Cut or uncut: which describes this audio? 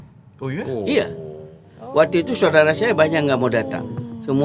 uncut